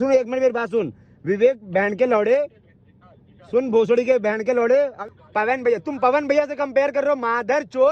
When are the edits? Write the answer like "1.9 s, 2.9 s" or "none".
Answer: 5.0 s